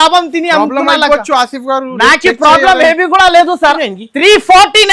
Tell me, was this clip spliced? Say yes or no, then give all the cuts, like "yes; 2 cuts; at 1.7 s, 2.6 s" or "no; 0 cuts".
yes; 1 cut; at 3.8 s